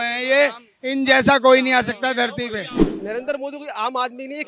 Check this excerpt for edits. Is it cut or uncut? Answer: cut